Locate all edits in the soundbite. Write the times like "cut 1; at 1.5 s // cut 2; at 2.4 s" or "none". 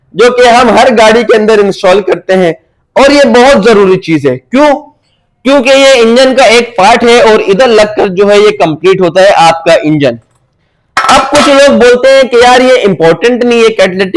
none